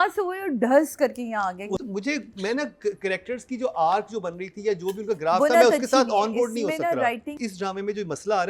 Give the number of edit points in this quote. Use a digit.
2